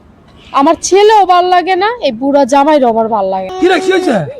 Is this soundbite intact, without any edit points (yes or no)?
no